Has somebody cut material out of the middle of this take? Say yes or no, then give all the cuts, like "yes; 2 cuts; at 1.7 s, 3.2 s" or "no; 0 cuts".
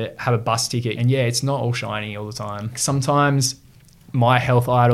yes; 2 cuts; at 0.9 s, 2.8 s